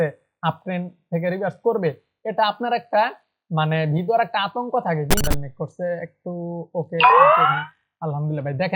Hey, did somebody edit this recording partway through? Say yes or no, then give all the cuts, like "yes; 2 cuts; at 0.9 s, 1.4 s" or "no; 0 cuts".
yes; 1 cut; at 5.2 s